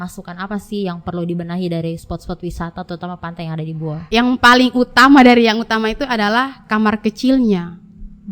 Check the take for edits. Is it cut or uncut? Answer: cut